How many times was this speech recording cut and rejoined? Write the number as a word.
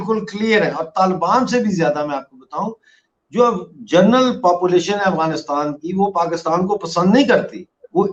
zero